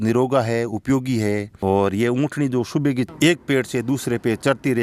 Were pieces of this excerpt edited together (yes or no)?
no